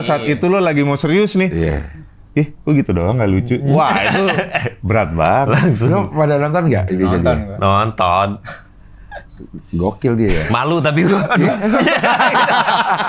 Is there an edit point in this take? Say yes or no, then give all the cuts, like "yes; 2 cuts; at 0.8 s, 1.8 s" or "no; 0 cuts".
no; 0 cuts